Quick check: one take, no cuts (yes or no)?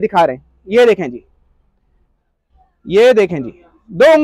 yes